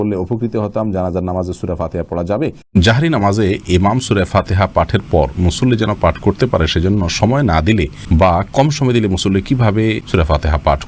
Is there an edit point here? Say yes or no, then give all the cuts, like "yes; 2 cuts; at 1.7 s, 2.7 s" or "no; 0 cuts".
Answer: yes; 3 cuts; at 2.6 s, 8.0 s, 10.0 s